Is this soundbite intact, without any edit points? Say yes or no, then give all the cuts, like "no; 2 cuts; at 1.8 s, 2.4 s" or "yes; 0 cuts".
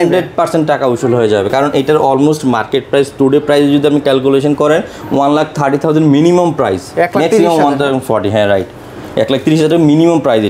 yes; 0 cuts